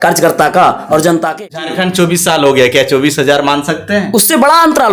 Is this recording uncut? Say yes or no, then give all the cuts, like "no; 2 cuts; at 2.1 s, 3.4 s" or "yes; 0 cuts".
no; 1 cut; at 1.3 s